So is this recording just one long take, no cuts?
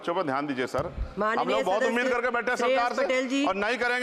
yes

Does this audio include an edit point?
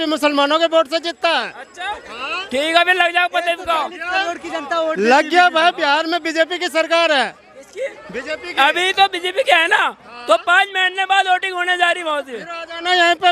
no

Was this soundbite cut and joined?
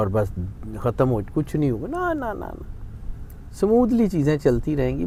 no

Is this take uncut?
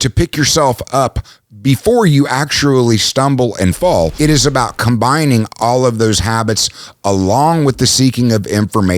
no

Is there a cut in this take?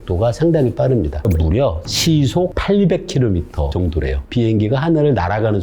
yes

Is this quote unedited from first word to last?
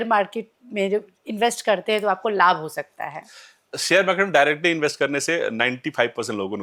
yes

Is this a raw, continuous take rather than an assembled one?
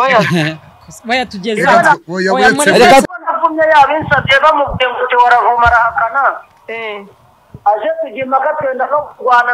yes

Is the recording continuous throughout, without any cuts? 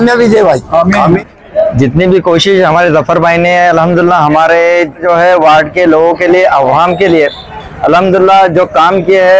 no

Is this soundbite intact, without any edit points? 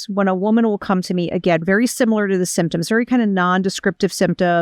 yes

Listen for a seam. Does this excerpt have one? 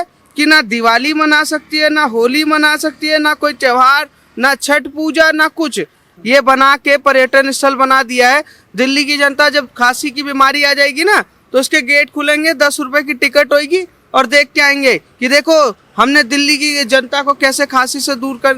yes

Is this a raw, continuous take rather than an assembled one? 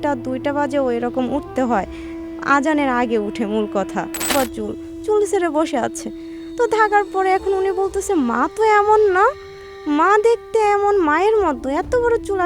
no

